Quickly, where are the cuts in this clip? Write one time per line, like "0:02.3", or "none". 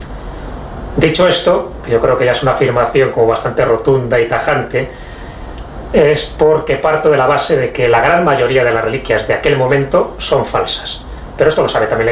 0:07.4